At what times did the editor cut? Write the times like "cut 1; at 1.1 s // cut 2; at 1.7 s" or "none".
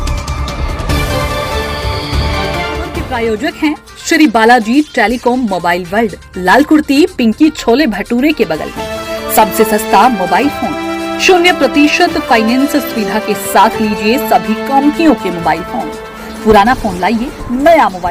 none